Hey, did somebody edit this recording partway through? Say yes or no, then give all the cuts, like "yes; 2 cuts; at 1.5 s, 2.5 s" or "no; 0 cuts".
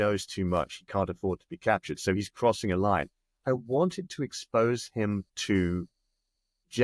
no; 0 cuts